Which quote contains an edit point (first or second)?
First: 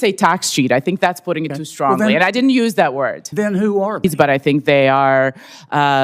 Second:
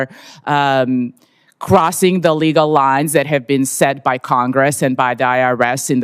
first